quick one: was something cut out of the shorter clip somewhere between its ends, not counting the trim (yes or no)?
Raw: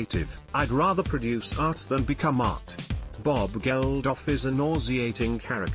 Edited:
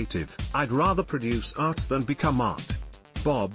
no